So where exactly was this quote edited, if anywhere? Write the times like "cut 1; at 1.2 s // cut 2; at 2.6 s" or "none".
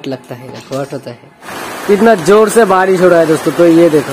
cut 1; at 1.5 s